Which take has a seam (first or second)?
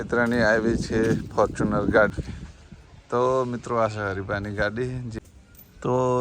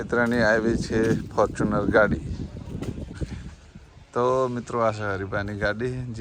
first